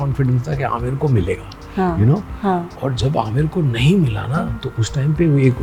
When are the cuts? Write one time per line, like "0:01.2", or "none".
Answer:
none

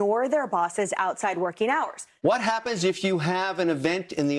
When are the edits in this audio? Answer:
none

